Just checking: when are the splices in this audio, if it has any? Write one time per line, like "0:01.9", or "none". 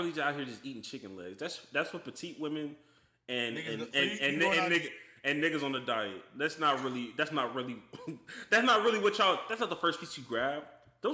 none